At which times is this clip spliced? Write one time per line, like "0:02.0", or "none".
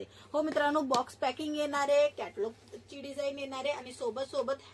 none